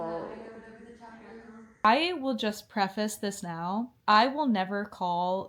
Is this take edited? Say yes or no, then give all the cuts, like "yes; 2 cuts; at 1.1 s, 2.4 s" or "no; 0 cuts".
yes; 1 cut; at 1.8 s